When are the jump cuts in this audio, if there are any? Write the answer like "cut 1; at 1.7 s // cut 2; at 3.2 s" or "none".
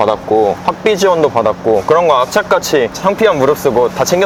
none